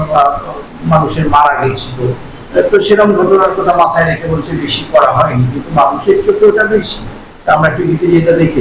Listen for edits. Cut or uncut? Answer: uncut